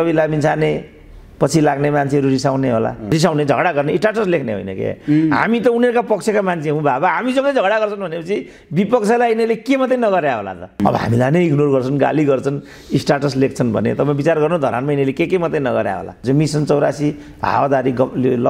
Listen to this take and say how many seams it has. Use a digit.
3